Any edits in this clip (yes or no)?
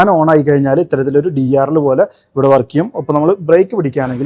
no